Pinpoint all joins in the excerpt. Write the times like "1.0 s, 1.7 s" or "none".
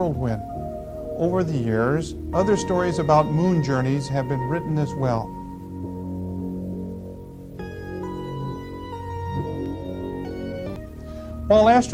1.6 s